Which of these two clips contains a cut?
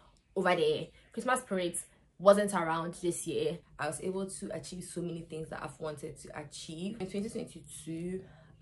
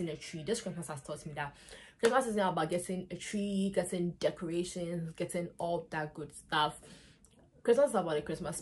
first; 2 cuts; at 3.7 s, 7.0 s

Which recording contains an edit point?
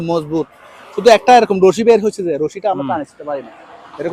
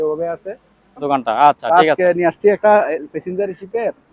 second; 1 cut; at 1.0 s

